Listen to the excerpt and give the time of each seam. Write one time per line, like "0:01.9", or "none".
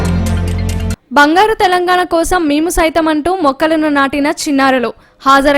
0:01.0